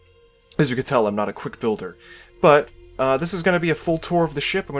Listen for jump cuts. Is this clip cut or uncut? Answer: cut